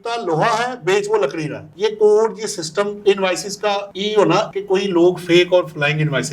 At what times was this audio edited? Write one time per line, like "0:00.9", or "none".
0:01.6
0:02.9
0:04.5